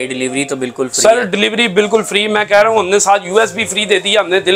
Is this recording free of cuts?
yes; 0 cuts

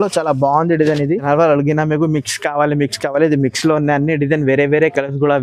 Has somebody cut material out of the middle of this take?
yes; 1 cut; at 1.2 s

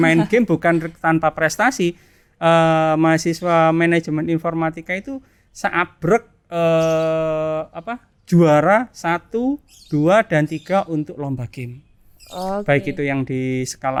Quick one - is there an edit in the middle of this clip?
no; 0 cuts

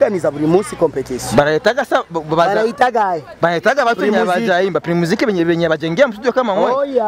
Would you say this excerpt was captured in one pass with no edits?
yes; 0 cuts

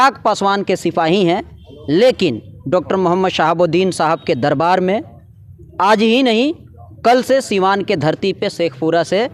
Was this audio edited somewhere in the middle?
no; 0 cuts

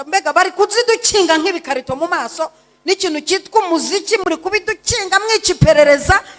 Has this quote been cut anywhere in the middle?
no; 0 cuts

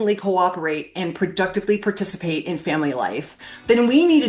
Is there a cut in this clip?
no; 0 cuts

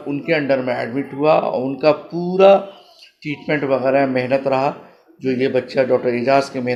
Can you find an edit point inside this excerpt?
no; 0 cuts

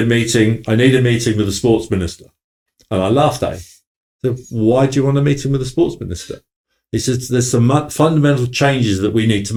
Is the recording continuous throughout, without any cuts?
yes; 0 cuts

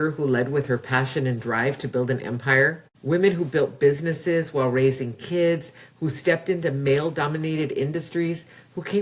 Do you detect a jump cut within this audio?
yes; 1 cut; at 2.9 s

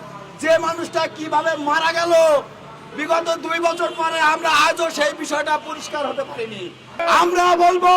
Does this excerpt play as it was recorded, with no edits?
no; 1 cut; at 7.0 s

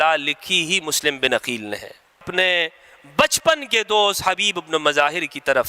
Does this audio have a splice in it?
yes; 1 cut; at 2.2 s

